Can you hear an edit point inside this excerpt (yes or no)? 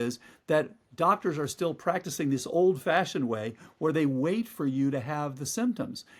no